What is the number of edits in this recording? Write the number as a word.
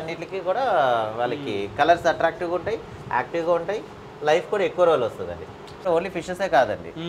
one